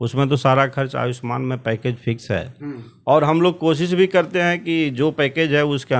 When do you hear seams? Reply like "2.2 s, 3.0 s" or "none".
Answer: none